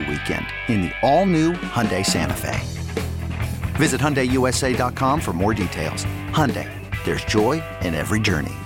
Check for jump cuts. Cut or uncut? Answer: uncut